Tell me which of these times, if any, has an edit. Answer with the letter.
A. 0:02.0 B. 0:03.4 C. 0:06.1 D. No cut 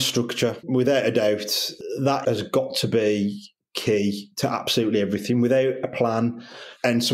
A